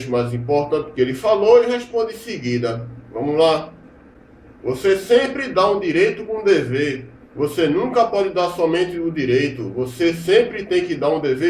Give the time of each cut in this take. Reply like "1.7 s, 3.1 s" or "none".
2.0 s